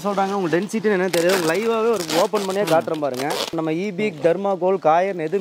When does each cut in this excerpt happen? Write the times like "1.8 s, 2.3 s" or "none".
3.5 s